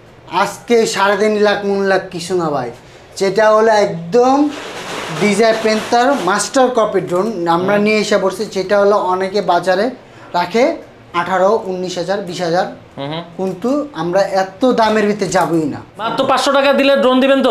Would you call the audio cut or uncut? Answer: cut